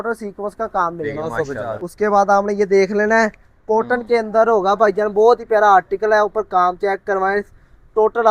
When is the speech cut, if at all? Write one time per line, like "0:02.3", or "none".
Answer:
0:01.7